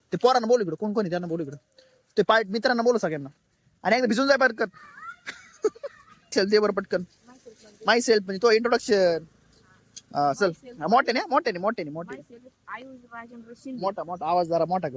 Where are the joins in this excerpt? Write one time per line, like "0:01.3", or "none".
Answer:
0:06.3